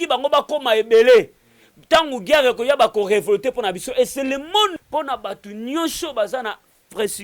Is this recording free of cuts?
no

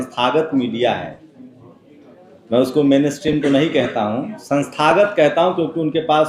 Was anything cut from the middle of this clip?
no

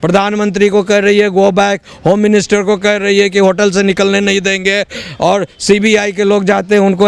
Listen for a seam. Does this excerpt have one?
no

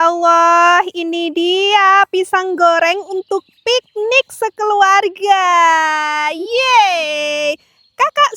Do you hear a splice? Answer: no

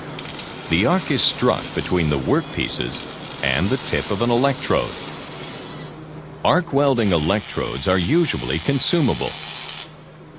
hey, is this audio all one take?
no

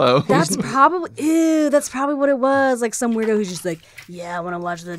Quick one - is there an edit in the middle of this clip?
no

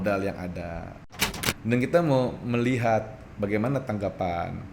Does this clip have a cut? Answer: yes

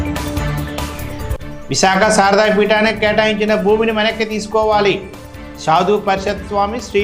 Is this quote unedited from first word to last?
yes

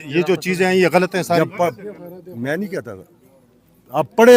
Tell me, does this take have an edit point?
no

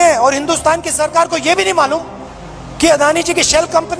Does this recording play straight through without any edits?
yes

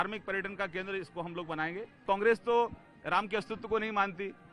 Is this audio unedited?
no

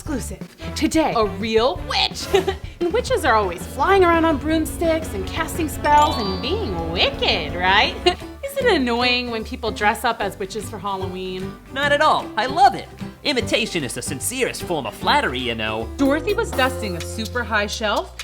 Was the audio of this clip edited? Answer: yes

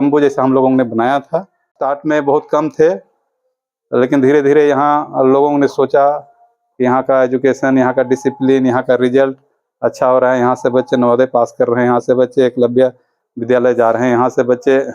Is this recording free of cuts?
no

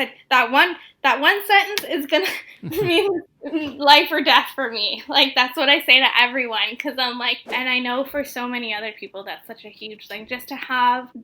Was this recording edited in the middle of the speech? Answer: yes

